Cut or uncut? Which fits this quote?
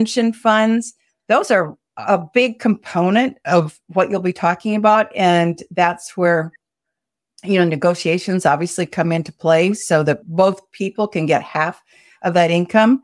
cut